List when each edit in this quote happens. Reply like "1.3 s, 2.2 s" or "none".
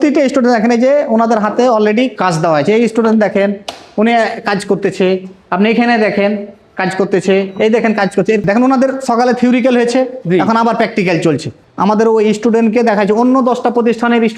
8.4 s, 11.6 s